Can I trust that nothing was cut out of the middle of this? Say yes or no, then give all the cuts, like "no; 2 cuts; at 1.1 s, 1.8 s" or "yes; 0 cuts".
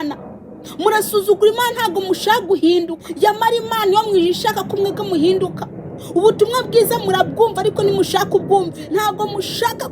no; 2 cuts; at 3.0 s, 8.8 s